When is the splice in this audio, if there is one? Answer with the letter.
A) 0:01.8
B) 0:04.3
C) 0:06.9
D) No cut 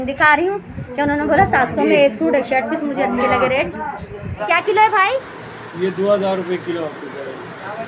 B